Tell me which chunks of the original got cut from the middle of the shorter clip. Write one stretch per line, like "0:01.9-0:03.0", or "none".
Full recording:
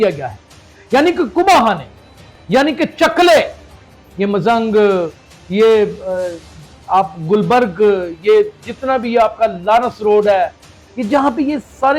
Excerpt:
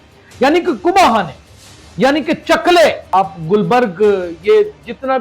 0:03.5-0:06.8